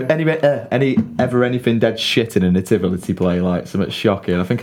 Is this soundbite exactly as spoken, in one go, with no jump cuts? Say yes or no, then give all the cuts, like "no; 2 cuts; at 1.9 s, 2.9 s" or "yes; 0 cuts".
yes; 0 cuts